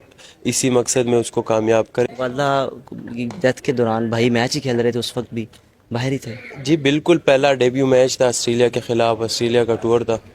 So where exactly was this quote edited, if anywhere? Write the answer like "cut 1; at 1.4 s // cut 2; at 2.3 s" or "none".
cut 1; at 2.1 s